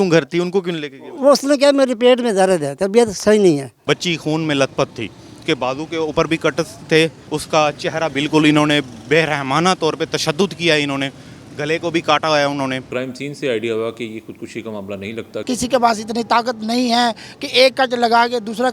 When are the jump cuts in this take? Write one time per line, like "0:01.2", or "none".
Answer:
0:03.8
0:05.3
0:07.2
0:12.9
0:15.4

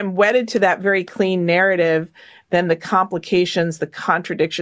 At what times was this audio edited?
none

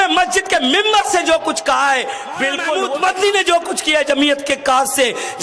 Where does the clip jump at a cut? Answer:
0:02.7

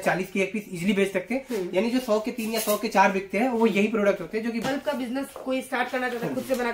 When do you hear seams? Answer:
0:04.7

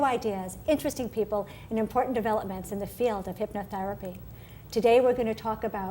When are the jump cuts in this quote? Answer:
0:01.6

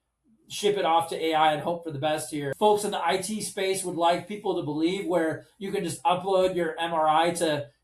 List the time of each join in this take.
0:02.5

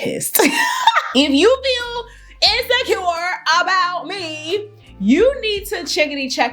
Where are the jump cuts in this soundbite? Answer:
0:01.0

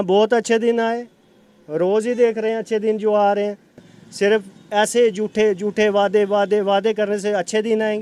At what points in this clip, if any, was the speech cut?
none

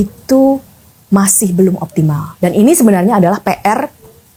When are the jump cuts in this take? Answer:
none

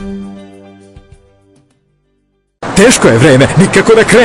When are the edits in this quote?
0:02.3

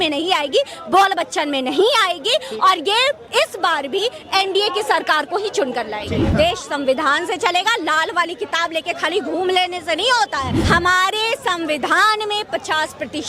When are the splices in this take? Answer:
0:06.3
0:10.6

